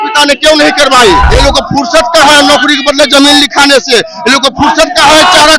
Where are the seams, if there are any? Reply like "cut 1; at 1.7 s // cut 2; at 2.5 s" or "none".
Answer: cut 1; at 1.3 s